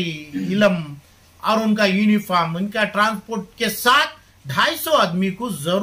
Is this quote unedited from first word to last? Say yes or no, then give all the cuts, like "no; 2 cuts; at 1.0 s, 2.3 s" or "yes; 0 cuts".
yes; 0 cuts